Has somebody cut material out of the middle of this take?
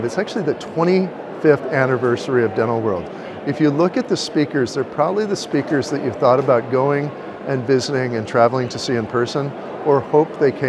no; 0 cuts

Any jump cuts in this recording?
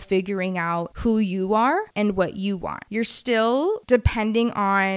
yes; 4 cuts; at 0.9 s, 1.9 s, 2.8 s, 3.8 s

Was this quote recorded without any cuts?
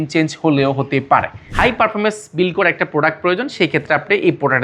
no; 1 cut; at 1.5 s

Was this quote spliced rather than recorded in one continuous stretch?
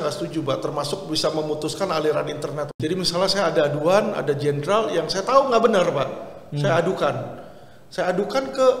yes; 1 cut; at 2.7 s

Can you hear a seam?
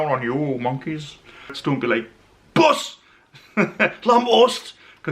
yes; 1 cut; at 1.6 s

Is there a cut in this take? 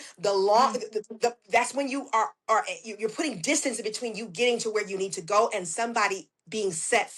no; 0 cuts

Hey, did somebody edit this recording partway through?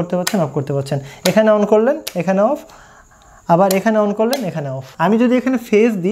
yes; 1 cut; at 4.9 s

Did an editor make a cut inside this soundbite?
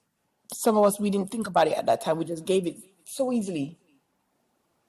no; 0 cuts

